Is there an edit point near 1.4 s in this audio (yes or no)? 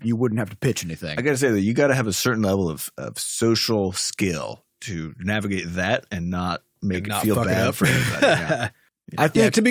no